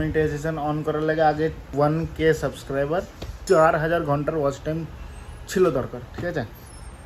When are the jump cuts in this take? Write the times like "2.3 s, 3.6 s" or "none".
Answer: 1.7 s, 3.3 s